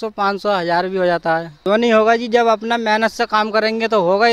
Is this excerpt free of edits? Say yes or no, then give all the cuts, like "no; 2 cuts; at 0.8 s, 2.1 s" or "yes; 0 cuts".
no; 1 cut; at 1.5 s